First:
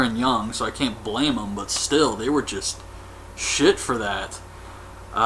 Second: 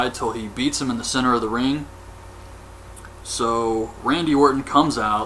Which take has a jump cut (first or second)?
second